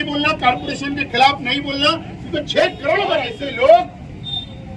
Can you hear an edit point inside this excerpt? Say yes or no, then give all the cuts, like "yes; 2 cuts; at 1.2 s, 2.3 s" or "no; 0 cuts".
yes; 1 cut; at 3.4 s